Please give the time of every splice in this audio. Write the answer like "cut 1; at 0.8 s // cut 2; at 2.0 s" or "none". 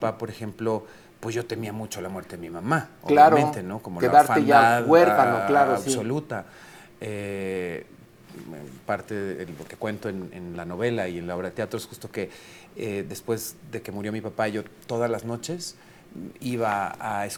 none